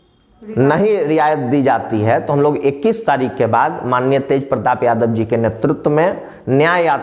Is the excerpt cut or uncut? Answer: uncut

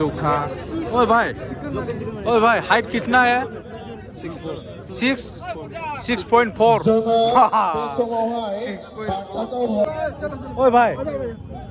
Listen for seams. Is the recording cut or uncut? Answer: uncut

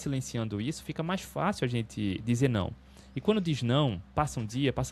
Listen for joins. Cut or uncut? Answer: uncut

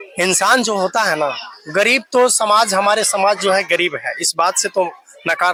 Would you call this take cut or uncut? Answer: uncut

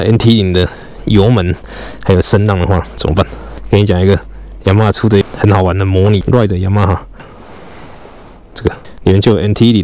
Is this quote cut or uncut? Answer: cut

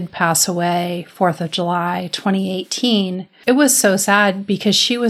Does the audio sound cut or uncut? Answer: cut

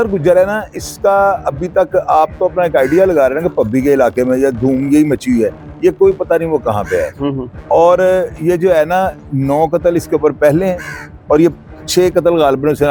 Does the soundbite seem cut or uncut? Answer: uncut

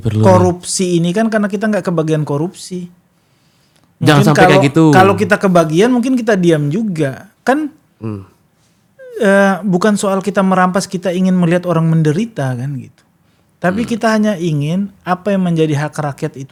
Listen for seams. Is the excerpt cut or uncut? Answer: uncut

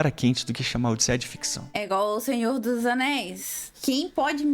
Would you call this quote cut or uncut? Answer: cut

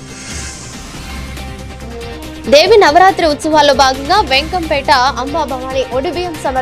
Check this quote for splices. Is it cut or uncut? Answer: cut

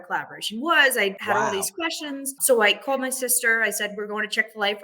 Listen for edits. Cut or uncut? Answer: cut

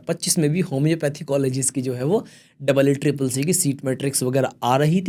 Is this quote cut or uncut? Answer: uncut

